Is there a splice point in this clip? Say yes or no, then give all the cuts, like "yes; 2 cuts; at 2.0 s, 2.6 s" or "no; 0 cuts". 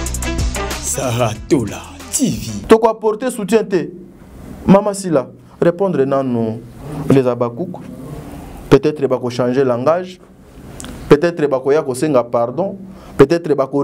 yes; 1 cut; at 2.5 s